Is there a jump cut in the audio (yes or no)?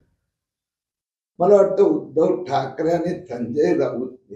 yes